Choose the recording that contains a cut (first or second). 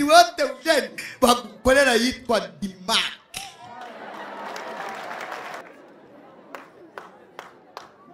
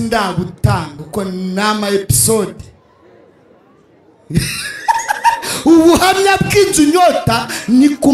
first